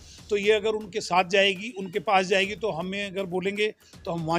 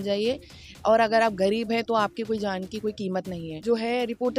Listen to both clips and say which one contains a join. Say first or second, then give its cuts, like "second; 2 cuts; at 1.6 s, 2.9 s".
second; 1 cut; at 3.5 s